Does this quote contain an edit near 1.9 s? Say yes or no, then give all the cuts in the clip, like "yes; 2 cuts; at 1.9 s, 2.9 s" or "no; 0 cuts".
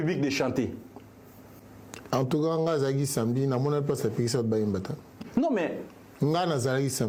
no; 0 cuts